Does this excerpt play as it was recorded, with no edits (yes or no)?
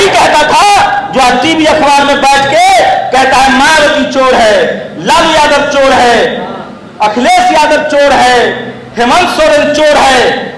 yes